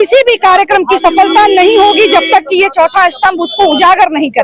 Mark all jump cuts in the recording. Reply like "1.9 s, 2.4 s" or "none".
1.1 s